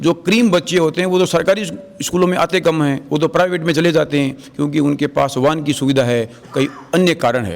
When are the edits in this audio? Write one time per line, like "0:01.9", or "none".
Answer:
none